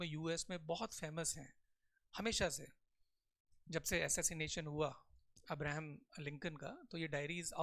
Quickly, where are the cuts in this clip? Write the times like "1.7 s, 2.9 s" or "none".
none